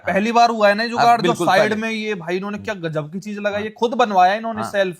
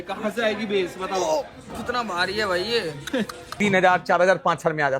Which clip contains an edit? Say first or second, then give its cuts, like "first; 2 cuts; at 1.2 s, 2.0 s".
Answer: second; 1 cut; at 3.5 s